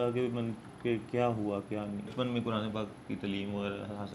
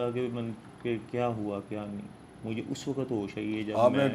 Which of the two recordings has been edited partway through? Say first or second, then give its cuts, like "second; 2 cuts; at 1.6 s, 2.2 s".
first; 1 cut; at 2.1 s